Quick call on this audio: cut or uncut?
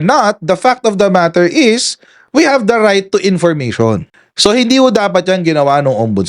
uncut